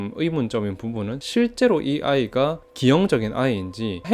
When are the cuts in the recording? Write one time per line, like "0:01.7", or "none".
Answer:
0:01.2